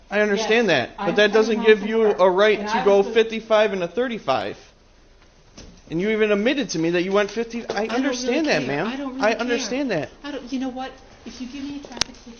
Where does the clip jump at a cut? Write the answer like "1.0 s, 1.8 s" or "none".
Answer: none